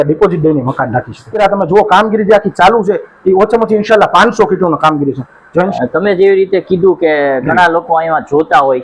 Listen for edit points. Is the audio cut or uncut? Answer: cut